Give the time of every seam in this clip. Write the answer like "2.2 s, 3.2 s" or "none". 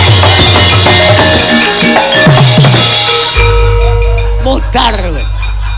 3.6 s